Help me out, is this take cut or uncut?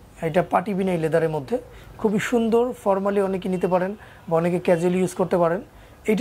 uncut